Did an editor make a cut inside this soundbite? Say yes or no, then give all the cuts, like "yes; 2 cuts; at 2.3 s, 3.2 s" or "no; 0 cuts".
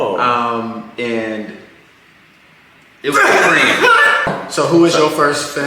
yes; 1 cut; at 4.3 s